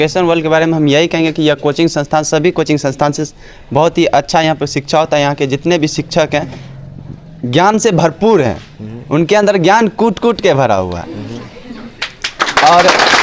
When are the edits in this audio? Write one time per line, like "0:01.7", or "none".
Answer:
none